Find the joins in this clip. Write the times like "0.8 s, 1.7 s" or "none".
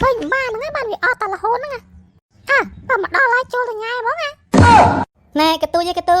5.1 s